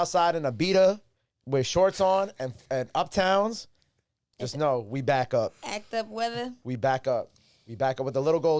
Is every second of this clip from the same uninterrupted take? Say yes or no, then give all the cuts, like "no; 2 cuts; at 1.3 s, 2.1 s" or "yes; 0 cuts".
yes; 0 cuts